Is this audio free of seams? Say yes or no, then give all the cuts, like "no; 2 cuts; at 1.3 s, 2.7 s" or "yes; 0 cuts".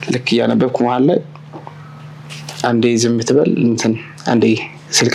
yes; 0 cuts